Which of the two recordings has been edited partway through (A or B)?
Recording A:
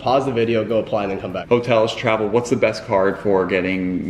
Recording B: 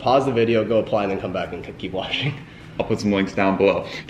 A